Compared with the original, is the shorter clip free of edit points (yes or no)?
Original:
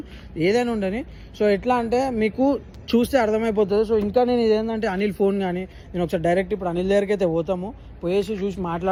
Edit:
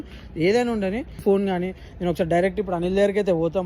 no